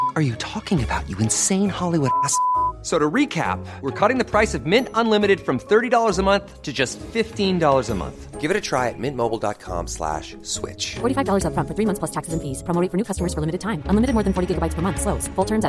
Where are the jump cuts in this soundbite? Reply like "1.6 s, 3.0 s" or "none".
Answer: none